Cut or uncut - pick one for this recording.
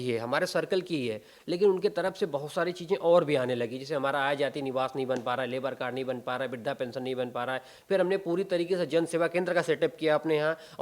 uncut